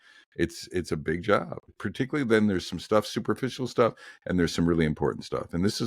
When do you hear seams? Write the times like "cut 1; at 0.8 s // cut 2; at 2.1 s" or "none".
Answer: cut 1; at 1.8 s